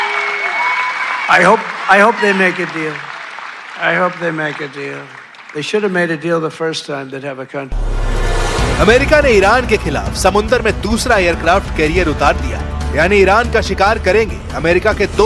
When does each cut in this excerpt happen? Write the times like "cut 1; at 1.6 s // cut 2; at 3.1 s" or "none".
cut 1; at 13.3 s